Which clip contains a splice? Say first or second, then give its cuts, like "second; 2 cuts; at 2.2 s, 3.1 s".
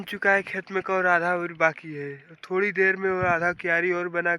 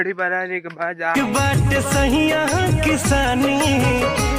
second; 1 cut; at 1.1 s